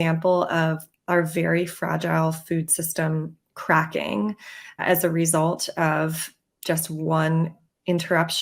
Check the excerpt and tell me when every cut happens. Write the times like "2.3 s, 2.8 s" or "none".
4.8 s